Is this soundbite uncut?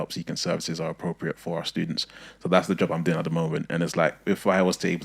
yes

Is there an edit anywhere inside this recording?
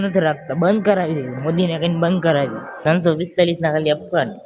yes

